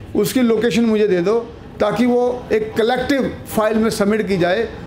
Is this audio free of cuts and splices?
yes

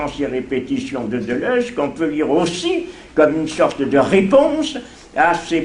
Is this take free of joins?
yes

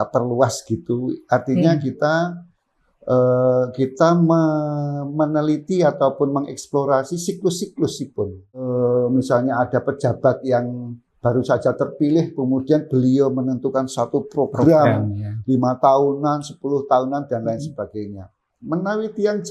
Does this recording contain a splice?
yes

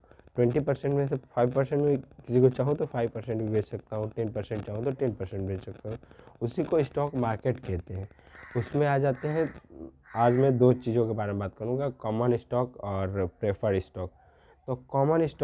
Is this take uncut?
yes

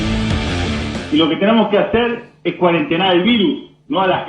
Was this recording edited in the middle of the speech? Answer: yes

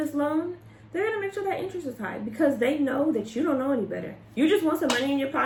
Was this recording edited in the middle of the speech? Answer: no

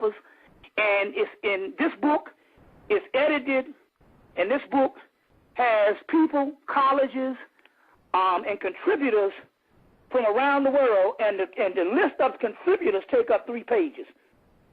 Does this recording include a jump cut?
yes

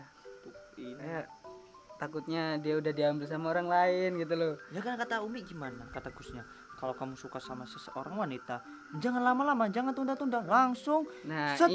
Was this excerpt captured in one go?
yes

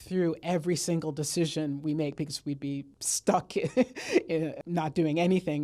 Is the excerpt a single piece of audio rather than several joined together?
no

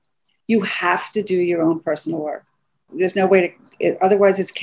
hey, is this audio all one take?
no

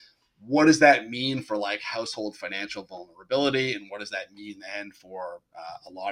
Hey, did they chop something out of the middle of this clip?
no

